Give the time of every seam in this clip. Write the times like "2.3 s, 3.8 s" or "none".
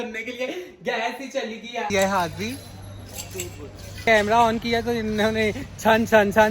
1.9 s, 4.1 s